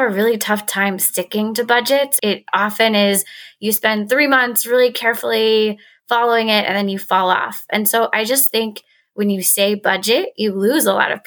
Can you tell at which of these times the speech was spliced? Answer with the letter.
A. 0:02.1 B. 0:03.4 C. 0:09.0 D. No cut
A